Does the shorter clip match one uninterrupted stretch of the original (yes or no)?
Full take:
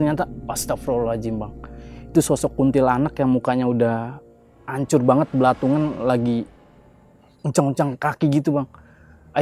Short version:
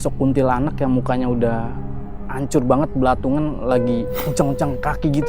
no